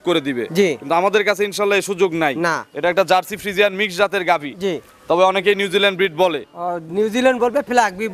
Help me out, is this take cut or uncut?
uncut